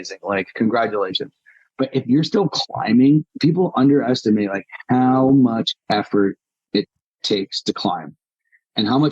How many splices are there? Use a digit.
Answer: 1